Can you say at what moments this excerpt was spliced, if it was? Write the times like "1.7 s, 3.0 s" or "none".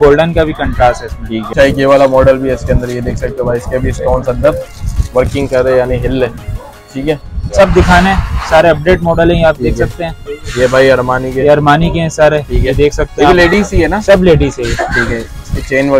1.4 s, 7.5 s